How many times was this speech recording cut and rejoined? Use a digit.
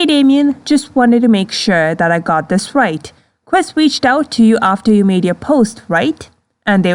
0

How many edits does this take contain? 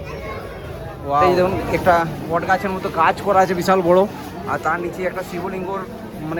1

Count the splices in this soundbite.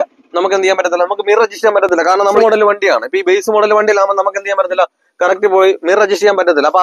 1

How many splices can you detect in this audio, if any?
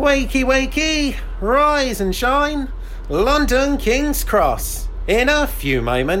0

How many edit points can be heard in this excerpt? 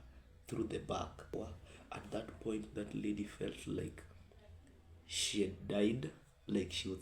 1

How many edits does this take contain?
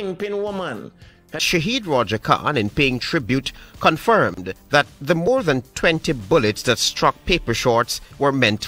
1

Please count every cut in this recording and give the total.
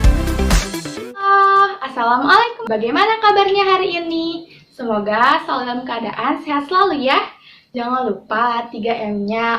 2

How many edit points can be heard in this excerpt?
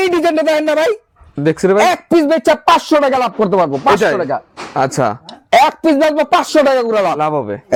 0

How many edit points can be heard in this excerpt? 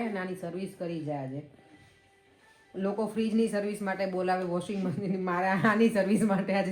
0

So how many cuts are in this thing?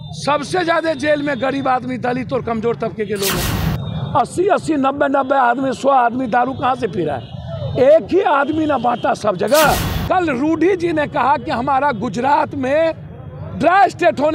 2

